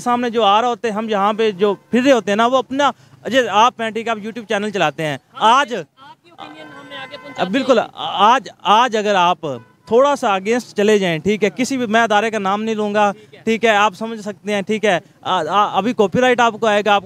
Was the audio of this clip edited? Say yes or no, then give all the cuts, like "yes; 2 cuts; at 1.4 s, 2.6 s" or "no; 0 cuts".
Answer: no; 0 cuts